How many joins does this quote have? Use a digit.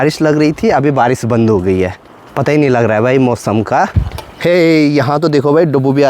0